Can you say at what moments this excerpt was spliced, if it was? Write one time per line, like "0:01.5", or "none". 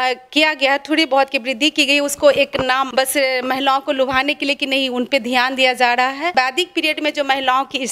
0:02.9
0:06.3

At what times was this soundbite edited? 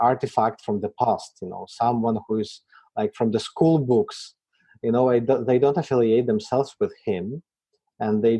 none

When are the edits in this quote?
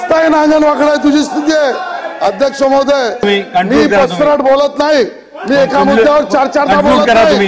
0:03.2

